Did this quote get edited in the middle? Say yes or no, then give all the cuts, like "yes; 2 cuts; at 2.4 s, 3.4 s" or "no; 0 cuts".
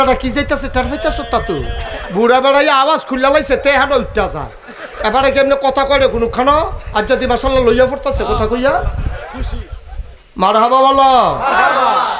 yes; 1 cut; at 10.1 s